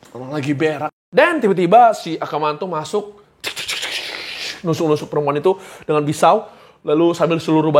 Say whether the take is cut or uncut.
cut